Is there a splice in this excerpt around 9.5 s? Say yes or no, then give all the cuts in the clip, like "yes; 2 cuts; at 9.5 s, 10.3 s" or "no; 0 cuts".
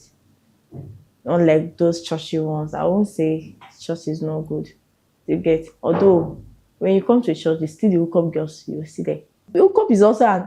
yes; 1 cut; at 9.5 s